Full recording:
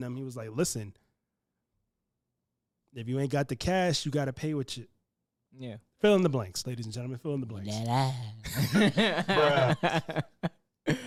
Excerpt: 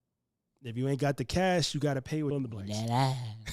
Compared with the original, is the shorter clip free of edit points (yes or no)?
no